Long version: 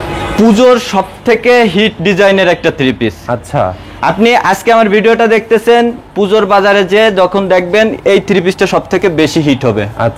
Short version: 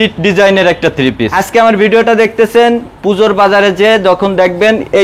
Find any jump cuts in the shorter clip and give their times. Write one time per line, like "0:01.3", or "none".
0:01.4